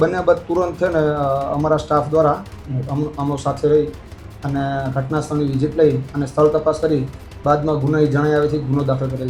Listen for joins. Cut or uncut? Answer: uncut